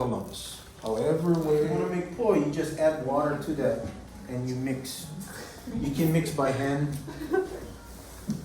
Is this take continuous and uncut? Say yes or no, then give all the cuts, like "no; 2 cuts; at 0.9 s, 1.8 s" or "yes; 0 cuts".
no; 1 cut; at 1.8 s